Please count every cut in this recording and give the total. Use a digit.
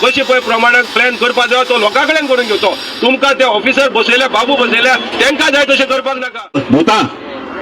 1